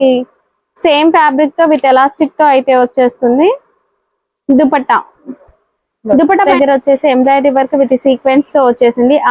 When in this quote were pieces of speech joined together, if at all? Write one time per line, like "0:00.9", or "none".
0:06.5